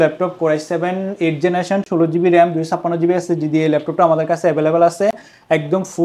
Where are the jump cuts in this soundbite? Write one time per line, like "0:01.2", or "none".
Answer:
none